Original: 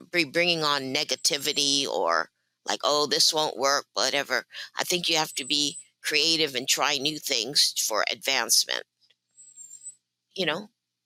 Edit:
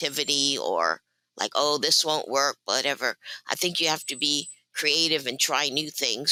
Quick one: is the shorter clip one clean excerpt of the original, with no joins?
yes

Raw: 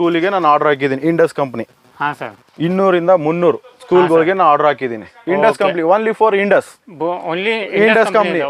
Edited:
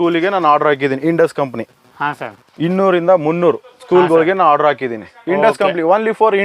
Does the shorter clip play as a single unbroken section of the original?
yes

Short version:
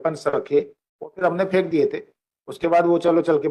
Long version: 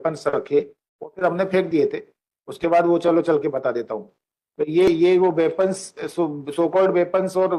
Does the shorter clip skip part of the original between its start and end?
no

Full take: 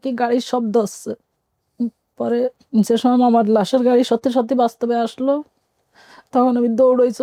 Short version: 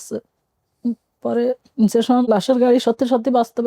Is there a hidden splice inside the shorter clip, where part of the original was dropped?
yes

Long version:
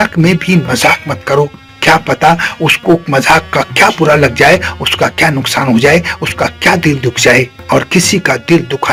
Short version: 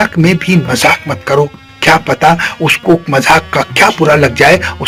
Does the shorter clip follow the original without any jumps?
yes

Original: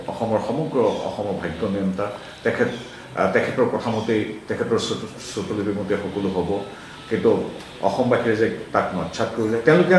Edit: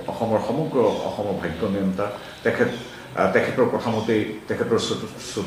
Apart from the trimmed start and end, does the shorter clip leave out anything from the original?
no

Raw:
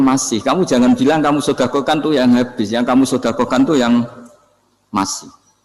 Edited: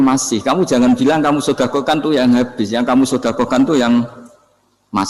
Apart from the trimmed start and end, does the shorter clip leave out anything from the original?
no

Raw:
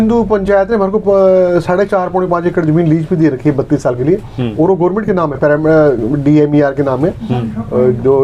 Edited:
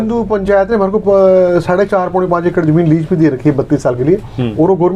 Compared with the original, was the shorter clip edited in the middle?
no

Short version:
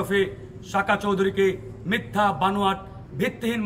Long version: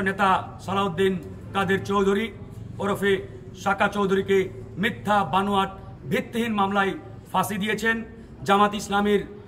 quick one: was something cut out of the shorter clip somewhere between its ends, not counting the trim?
no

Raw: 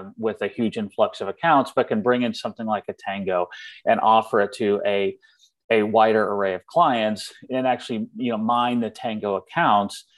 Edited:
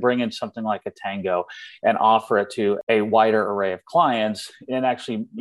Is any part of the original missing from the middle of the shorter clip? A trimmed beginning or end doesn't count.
yes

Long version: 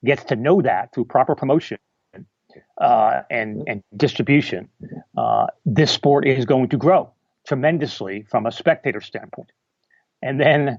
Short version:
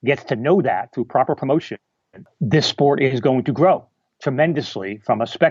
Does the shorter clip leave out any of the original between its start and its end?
yes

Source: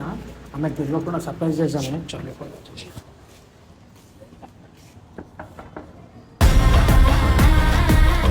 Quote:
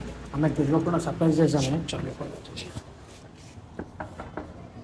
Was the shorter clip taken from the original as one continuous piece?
no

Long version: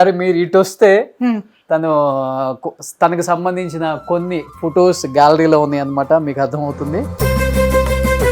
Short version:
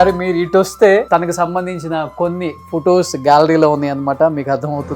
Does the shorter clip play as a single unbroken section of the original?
no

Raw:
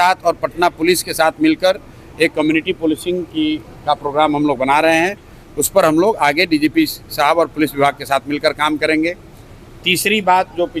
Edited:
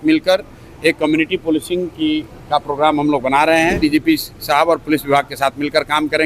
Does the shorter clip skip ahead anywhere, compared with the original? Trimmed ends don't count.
yes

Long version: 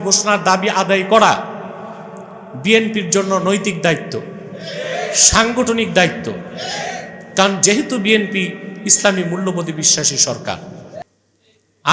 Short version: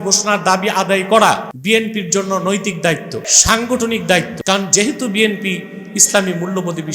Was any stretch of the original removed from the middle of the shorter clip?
yes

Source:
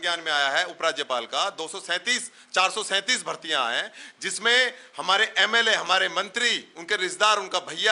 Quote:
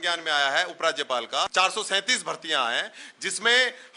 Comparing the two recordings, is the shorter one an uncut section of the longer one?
no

